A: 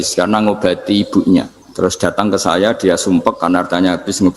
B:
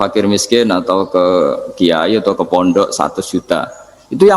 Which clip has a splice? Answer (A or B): A